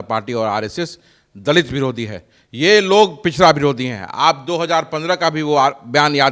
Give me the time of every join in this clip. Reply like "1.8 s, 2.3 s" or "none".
none